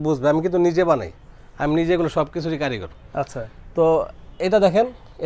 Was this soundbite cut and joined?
no; 0 cuts

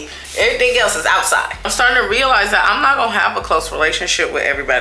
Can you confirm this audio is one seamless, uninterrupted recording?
no; 1 cut; at 1.7 s

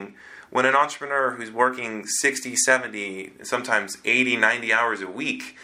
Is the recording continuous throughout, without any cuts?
yes; 0 cuts

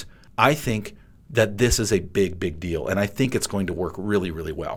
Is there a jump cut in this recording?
no; 0 cuts

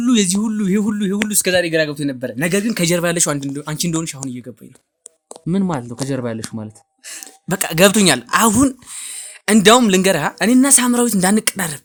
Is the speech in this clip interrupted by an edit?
no; 0 cuts

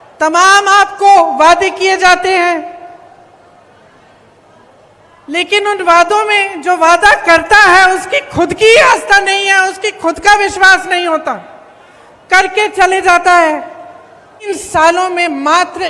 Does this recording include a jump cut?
yes; 1 cut; at 14.5 s

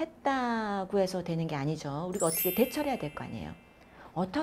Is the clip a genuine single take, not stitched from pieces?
yes; 0 cuts

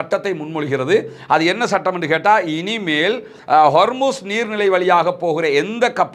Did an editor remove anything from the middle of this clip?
no; 0 cuts

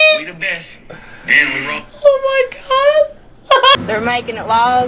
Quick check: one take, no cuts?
no; 1 cut; at 3.8 s

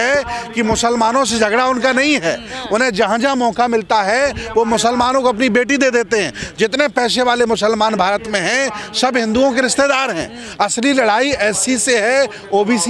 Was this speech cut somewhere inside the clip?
no; 0 cuts

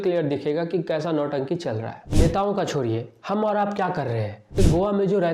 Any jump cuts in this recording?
yes; 2 cuts; at 2.0 s, 4.6 s

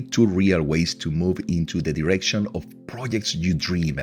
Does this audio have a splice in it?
no; 0 cuts

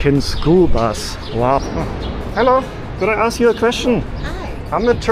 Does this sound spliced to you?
yes; 1 cut; at 1.6 s

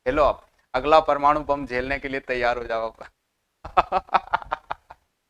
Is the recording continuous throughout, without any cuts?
yes; 0 cuts

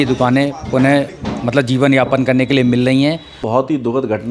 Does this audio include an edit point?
yes; 1 cut; at 3.3 s

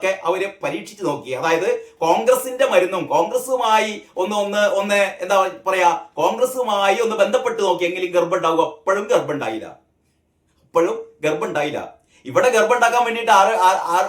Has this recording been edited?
no; 0 cuts

